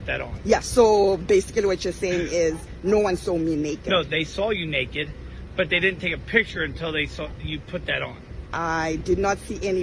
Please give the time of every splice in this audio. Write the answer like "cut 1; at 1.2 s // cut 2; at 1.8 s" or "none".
none